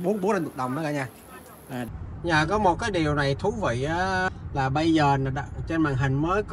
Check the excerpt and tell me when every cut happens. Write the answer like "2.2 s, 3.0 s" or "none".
1.9 s, 4.3 s